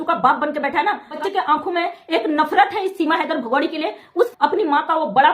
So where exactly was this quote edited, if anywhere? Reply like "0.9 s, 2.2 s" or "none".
1.2 s, 4.3 s